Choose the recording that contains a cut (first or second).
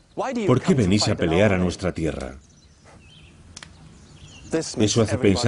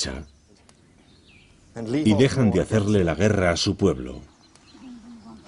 second